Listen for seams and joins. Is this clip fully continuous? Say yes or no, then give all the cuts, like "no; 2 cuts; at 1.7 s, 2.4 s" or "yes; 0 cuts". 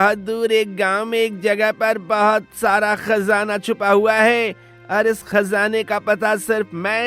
yes; 0 cuts